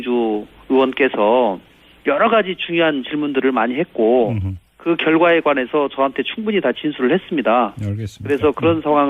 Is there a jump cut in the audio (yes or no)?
yes